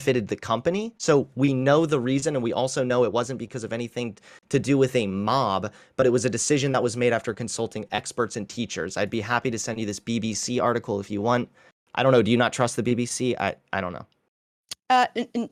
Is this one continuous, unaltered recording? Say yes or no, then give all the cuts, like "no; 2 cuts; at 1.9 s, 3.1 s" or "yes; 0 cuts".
yes; 0 cuts